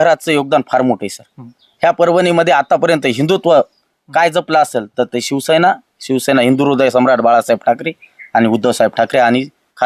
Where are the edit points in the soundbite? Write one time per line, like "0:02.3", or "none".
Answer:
none